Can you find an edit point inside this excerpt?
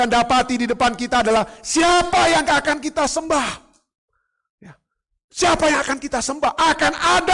no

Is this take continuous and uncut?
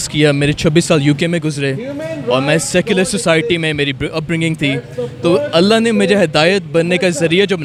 yes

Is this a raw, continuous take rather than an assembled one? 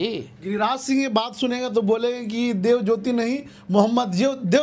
yes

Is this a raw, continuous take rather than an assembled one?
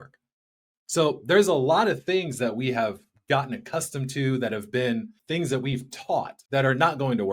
no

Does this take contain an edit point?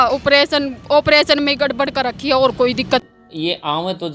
yes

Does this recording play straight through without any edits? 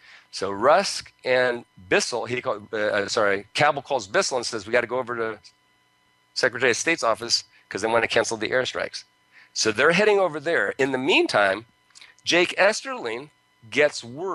no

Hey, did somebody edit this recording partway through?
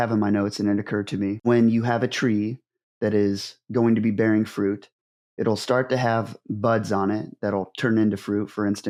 no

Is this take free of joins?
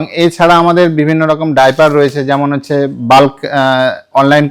yes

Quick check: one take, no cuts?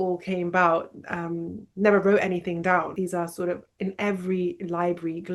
no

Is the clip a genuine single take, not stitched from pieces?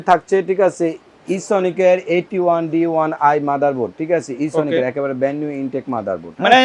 yes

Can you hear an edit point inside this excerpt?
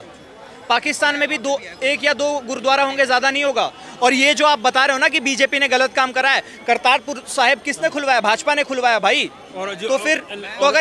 no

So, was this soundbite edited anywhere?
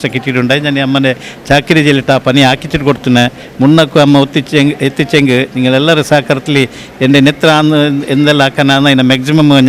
no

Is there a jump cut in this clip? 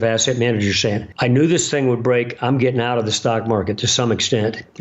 yes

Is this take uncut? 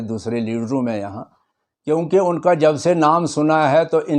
yes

